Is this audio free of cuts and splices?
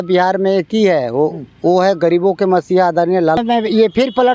no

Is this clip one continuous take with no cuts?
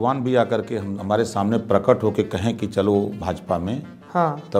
yes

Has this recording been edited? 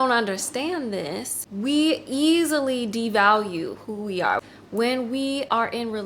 yes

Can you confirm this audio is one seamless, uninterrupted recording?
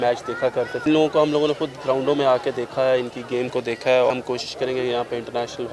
no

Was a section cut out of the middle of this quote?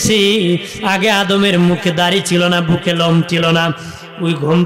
no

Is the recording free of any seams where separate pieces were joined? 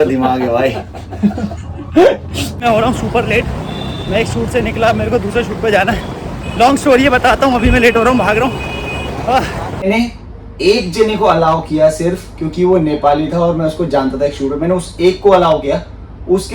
no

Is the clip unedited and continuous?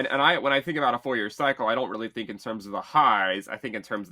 yes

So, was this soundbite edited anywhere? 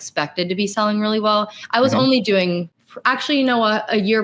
no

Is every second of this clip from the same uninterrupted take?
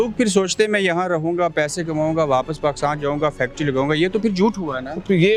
yes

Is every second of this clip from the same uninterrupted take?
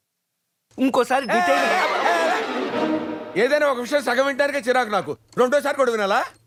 yes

